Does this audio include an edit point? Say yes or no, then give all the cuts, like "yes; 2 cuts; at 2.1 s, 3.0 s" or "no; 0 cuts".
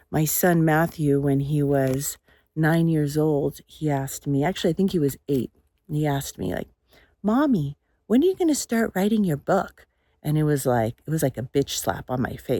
no; 0 cuts